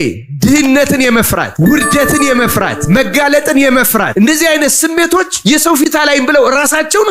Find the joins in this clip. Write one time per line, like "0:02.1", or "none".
0:01.1
0:02.8
0:04.1
0:05.8